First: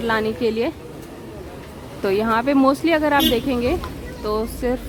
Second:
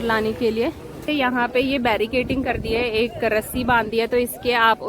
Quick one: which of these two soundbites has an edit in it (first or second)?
second